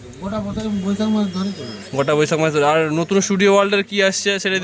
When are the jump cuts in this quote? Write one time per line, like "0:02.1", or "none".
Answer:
none